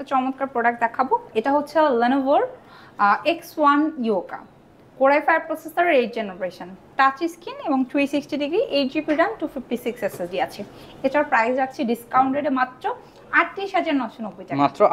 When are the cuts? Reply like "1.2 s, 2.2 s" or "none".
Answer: none